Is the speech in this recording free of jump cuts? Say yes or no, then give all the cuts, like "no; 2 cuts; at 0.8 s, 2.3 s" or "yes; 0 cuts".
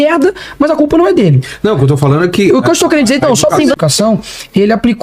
no; 1 cut; at 3.8 s